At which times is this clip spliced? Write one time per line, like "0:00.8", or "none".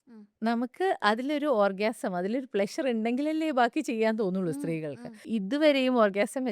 0:05.2